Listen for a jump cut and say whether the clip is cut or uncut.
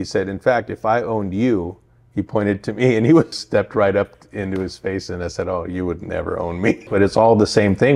cut